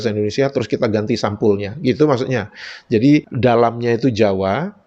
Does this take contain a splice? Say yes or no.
no